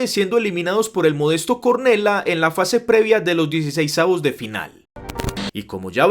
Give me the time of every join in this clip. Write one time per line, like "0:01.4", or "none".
0:05.1